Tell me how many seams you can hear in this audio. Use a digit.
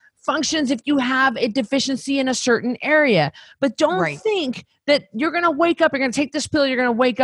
0